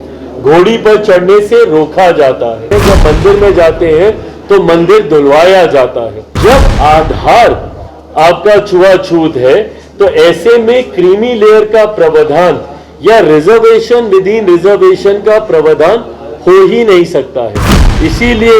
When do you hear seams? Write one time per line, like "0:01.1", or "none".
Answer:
0:02.7
0:06.4

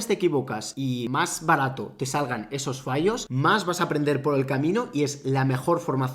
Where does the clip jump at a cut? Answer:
0:00.9
0:03.3

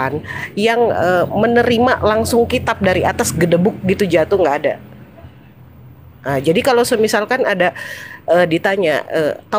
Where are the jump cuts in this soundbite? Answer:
none

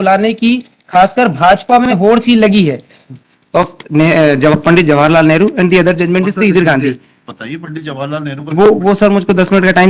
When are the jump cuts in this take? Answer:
0:03.1

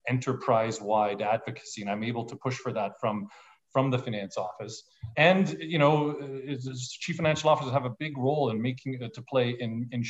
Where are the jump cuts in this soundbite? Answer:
none

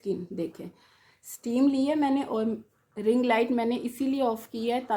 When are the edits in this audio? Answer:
none

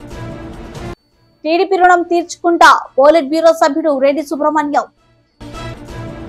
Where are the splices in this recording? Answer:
none

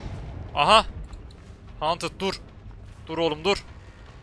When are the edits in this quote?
none

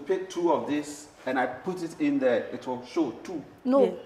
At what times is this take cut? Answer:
none

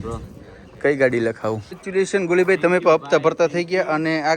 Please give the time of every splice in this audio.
0:01.8

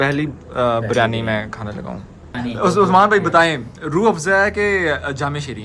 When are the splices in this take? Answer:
0:02.2

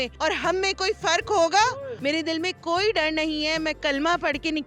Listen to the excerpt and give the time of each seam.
0:01.9

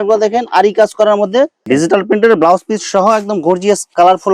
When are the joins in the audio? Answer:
0:01.6

